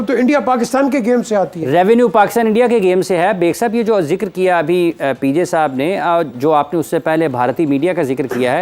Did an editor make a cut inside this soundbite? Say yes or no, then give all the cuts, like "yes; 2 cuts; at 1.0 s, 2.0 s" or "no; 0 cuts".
no; 0 cuts